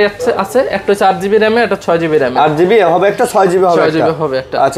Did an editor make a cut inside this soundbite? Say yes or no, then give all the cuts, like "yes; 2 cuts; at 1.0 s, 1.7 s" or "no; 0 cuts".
no; 0 cuts